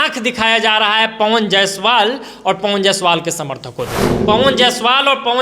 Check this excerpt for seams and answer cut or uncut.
cut